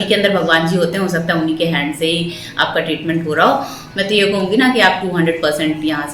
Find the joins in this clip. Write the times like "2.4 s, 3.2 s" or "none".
3.8 s